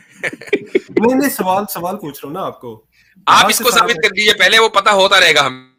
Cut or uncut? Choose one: uncut